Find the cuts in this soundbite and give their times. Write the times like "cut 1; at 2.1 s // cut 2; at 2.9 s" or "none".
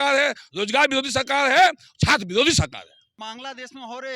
cut 1; at 3.1 s